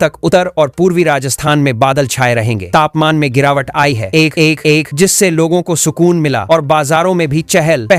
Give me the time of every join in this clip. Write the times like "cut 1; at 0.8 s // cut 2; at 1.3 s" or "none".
none